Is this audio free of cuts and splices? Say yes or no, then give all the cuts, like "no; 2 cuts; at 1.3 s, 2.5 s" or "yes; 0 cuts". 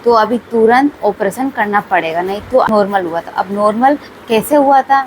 no; 1 cut; at 2.7 s